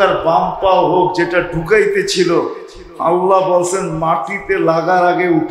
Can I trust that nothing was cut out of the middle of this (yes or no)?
yes